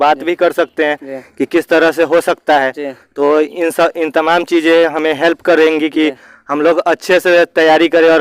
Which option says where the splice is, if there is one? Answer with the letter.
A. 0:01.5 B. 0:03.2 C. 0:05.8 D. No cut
D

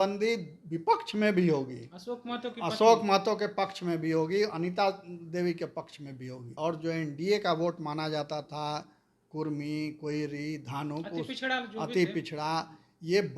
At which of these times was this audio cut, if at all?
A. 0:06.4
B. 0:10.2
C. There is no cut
A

